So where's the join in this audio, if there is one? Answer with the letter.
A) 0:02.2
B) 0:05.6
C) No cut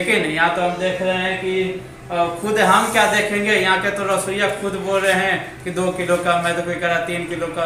C